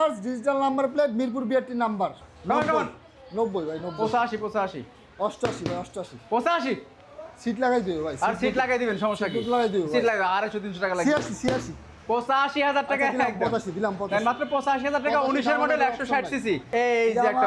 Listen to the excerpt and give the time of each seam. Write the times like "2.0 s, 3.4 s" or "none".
2.2 s, 16.6 s

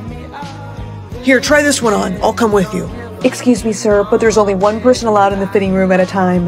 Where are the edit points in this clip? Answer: 1.2 s

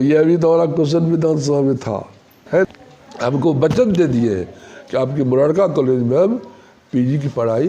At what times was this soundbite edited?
2.7 s

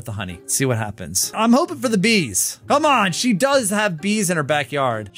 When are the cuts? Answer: none

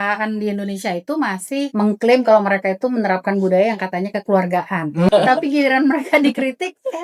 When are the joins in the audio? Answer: 1.7 s, 5.1 s

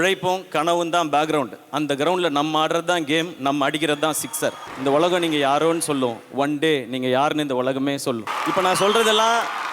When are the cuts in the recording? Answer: 4.7 s, 8.3 s

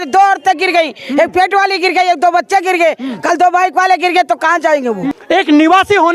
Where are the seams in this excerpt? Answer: 5.1 s

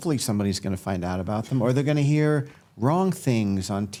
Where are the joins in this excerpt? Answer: none

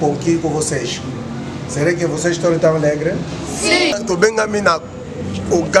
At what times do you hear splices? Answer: 3.9 s

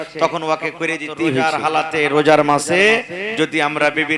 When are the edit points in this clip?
1.4 s

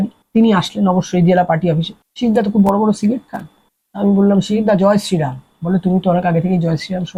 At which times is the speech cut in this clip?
none

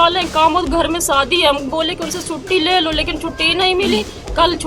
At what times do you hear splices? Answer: none

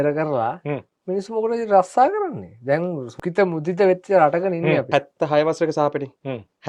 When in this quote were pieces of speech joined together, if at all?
3.1 s, 4.9 s

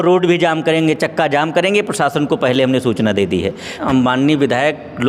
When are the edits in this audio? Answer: 3.8 s

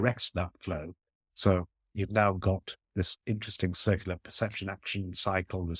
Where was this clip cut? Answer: none

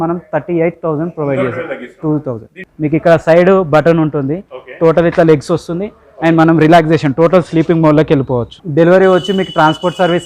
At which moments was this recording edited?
2.6 s, 8.6 s

